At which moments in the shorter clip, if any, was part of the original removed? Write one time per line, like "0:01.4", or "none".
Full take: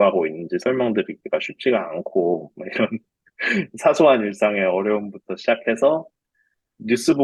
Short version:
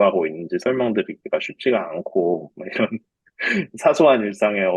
none